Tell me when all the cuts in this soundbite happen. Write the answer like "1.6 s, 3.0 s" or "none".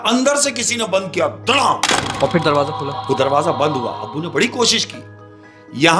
none